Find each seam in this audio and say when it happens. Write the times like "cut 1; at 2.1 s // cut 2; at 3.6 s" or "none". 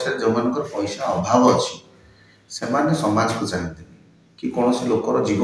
none